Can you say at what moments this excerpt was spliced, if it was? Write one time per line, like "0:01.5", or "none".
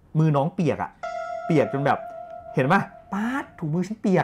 0:02.9